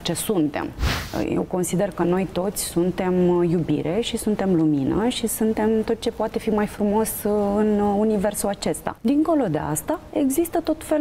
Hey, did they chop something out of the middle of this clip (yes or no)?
yes